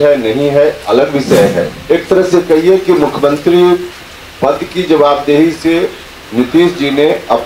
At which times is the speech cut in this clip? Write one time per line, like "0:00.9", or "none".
0:01.8